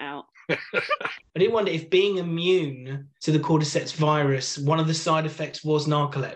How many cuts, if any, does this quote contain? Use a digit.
1